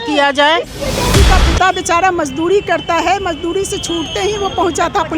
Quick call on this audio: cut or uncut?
cut